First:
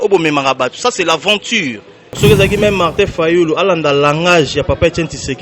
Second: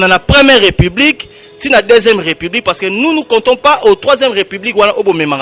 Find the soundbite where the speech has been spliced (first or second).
first